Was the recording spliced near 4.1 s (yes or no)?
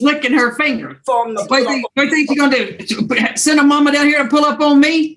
no